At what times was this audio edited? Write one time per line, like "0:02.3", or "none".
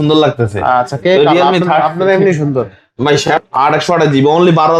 0:03.2